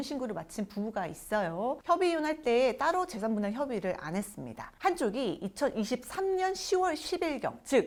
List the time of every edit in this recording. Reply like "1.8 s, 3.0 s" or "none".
none